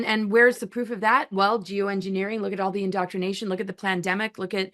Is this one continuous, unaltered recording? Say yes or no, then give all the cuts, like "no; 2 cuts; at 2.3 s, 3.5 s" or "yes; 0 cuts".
yes; 0 cuts